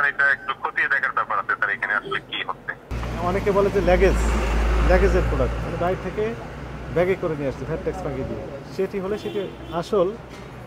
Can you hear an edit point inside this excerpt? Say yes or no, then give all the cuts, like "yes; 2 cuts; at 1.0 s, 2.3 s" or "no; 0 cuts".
yes; 1 cut; at 3.0 s